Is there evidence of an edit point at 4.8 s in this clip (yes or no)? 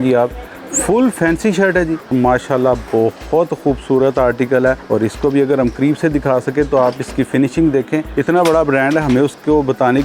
yes